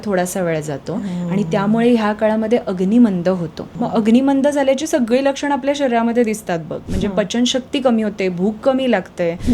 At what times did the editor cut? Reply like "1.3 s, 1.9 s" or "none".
3.7 s